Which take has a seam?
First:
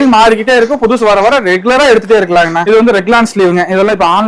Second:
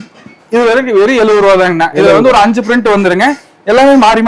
first; 1 cut; at 2.5 s

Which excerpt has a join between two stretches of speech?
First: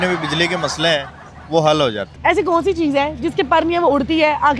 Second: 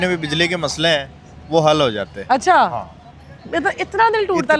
first; 1 cut; at 2.1 s

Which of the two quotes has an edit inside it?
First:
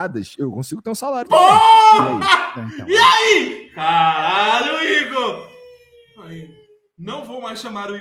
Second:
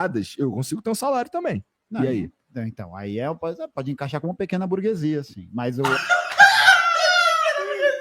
second; 1 cut; at 1.3 s

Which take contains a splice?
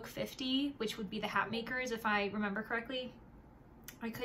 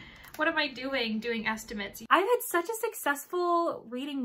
second; 1 cut; at 1.9 s

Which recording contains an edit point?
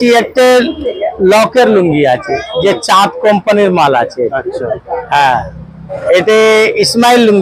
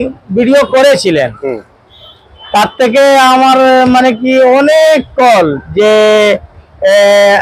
first; 1 cut; at 5.9 s

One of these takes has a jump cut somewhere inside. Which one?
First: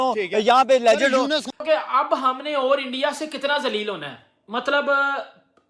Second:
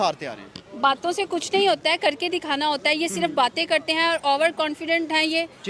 first; 1 cut; at 1.6 s

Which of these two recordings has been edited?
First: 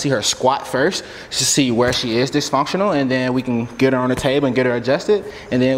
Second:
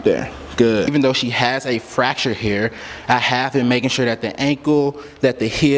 second; 1 cut; at 0.9 s

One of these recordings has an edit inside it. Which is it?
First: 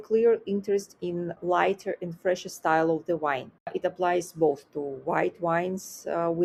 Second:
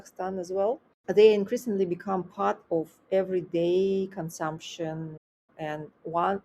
second; 1 cut; at 5.4 s

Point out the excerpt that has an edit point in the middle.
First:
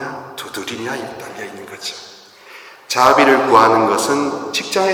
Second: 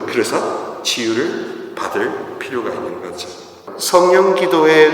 second; 1 cut; at 3.6 s

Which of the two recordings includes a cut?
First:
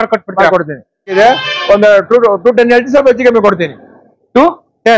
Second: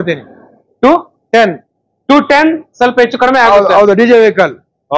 first; 1 cut; at 1.1 s

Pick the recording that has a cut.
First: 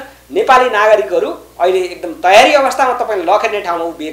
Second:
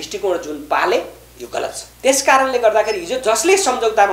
second; 1 cut; at 1.9 s

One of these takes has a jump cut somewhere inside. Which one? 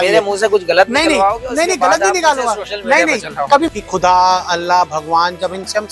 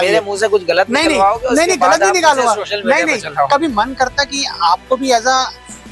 first; 1 cut; at 3.7 s

